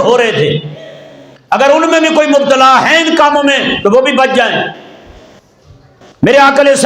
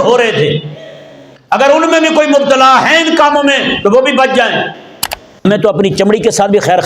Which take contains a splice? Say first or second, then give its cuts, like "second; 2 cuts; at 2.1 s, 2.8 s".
second; 1 cut; at 5.4 s